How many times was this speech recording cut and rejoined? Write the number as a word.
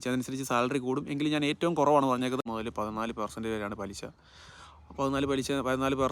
one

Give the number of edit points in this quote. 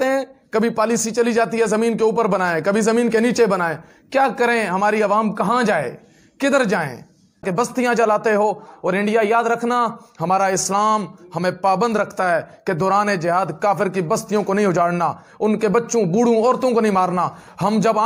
one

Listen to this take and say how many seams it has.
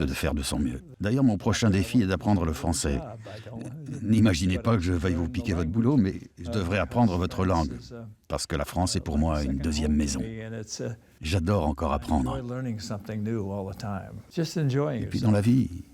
three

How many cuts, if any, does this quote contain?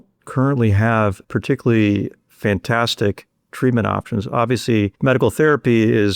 three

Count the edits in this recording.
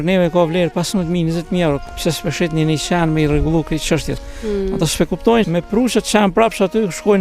two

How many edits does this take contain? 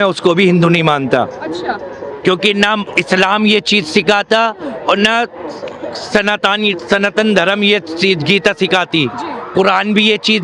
zero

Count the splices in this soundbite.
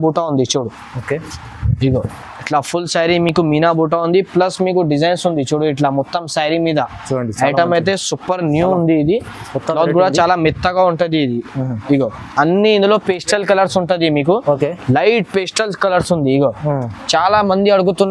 zero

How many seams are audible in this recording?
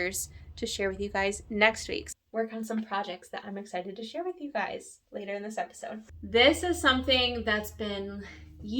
two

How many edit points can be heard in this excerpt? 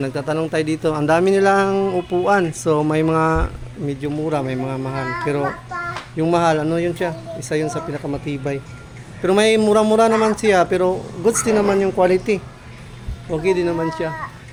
zero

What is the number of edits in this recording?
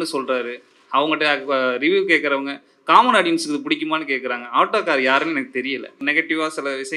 one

